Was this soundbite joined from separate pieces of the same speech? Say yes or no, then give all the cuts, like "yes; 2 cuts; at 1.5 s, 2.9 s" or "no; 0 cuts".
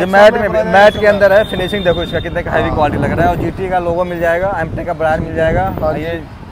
no; 0 cuts